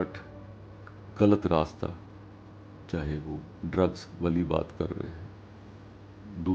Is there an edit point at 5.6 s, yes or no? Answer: no